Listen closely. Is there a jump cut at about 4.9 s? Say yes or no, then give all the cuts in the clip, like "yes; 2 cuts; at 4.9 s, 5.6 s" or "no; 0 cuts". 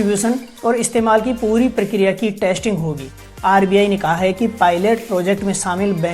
no; 1 cut; at 3.3 s